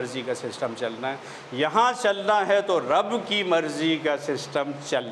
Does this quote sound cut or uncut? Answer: uncut